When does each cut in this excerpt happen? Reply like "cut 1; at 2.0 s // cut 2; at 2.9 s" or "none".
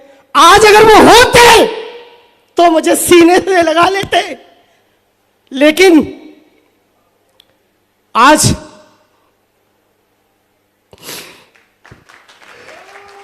none